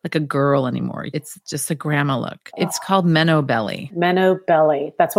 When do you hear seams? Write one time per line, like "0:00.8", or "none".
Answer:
0:01.0
0:02.4
0:03.9